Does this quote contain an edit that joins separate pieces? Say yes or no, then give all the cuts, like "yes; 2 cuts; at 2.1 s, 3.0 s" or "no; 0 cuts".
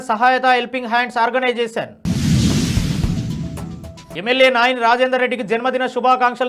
no; 0 cuts